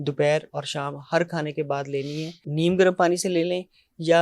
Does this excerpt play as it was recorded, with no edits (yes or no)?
no